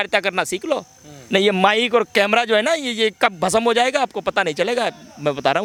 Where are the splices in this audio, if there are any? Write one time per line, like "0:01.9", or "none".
none